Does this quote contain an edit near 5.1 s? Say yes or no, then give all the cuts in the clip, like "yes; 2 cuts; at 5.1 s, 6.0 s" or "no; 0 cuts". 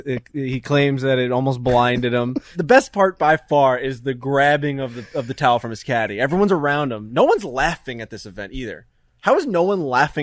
no; 1 cut; at 2.5 s